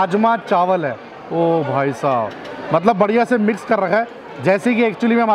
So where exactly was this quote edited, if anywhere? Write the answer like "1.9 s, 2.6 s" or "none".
none